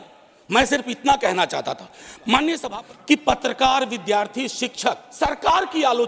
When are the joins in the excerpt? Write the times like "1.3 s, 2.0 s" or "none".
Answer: 2.6 s, 5.1 s